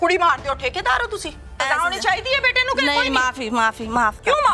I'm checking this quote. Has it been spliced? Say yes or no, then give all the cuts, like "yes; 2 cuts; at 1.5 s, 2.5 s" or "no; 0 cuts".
yes; 1 cut; at 1.6 s